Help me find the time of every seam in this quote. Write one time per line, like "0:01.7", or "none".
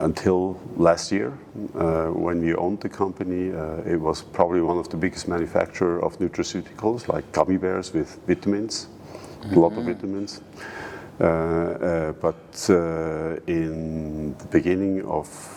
none